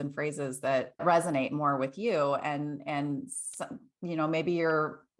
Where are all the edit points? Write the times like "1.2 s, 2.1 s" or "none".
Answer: 1.0 s